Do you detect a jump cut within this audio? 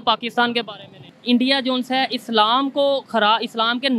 yes; 1 cut; at 1.1 s

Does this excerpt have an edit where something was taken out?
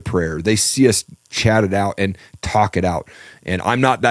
no; 0 cuts

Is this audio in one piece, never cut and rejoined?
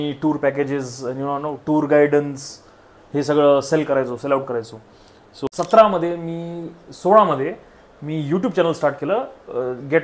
no; 1 cut; at 5.3 s

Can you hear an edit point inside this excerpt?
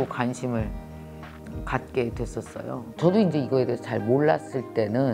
no; 0 cuts

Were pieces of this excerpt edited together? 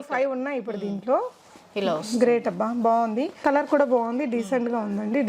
yes; 1 cut; at 3.3 s

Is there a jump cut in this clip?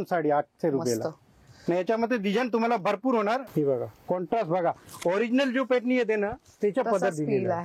yes; 1 cut; at 3.5 s

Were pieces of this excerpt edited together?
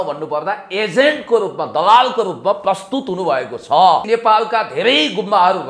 yes; 1 cut; at 4.0 s

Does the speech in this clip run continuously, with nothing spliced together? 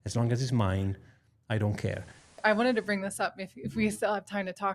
no; 1 cut; at 2.4 s

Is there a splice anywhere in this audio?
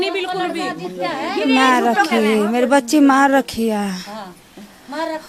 no; 0 cuts

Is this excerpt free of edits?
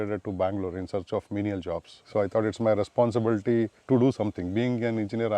no; 2 cuts; at 2.0 s, 3.8 s

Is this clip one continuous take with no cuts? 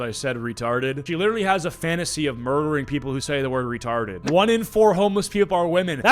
no; 2 cuts; at 1.0 s, 4.2 s

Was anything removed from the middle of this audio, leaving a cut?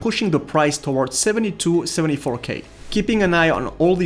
yes; 1 cut; at 2.7 s

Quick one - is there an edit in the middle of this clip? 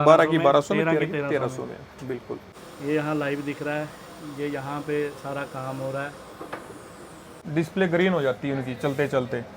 yes; 2 cuts; at 2.6 s, 7.3 s

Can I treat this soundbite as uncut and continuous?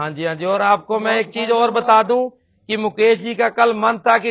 yes; 0 cuts

